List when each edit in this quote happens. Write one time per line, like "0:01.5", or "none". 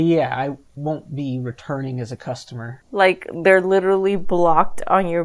none